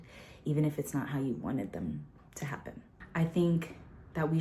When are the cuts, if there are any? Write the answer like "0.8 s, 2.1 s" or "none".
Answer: 2.9 s